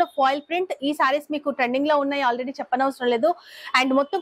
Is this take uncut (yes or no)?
yes